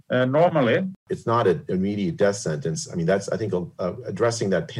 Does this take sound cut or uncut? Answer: cut